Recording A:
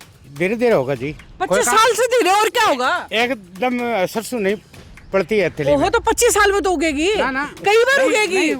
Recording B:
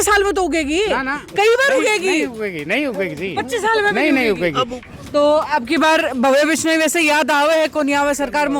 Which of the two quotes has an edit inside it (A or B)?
B